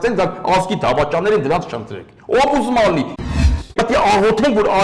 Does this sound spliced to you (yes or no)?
yes